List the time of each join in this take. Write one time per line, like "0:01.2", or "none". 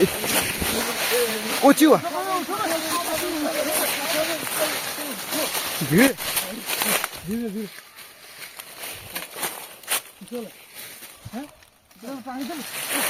none